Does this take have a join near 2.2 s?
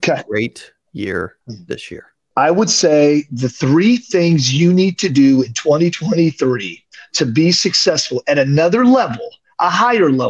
yes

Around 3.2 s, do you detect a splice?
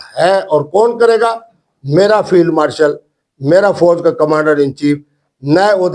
no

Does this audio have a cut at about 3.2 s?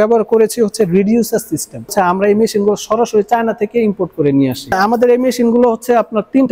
no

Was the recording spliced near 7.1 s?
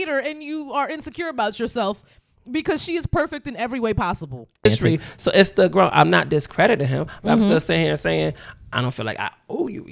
no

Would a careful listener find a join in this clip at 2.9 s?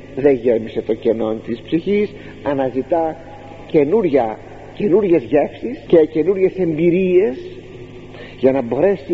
no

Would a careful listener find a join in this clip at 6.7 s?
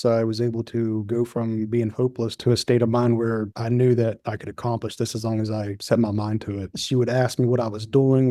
yes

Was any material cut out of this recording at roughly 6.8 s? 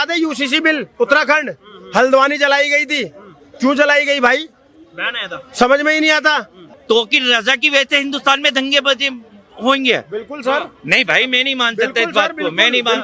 yes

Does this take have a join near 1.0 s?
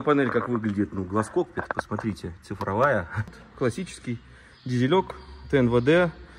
no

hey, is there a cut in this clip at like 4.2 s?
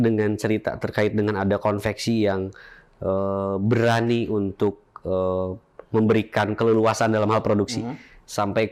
no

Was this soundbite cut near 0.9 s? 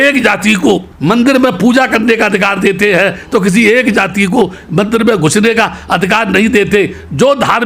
yes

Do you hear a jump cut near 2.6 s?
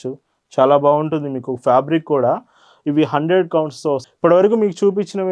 no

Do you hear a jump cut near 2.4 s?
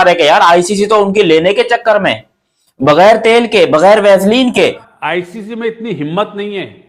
no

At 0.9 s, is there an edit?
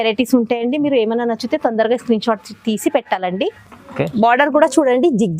no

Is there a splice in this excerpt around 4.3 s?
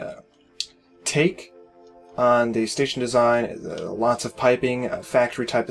yes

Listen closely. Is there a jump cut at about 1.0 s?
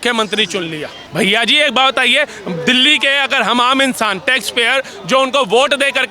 yes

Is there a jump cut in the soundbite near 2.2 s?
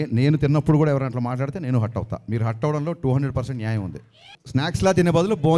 no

